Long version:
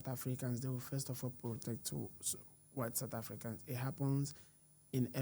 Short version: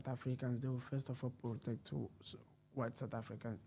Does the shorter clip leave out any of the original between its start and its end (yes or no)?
no